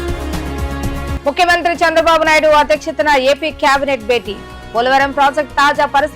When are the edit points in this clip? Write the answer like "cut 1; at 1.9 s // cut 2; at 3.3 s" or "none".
cut 1; at 1.1 s